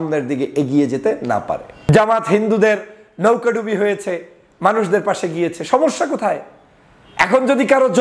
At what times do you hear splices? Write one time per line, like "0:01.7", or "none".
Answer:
0:01.9